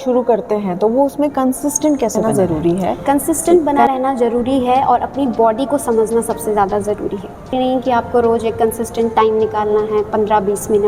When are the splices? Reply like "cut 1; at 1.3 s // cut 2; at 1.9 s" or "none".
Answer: cut 1; at 2.2 s // cut 2; at 7.5 s